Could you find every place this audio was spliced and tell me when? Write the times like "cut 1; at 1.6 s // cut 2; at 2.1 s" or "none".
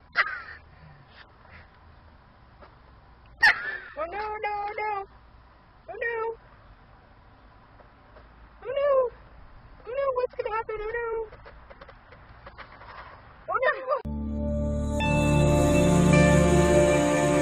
cut 1; at 8.0 s